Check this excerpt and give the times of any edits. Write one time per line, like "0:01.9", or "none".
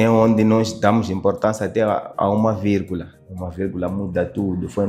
none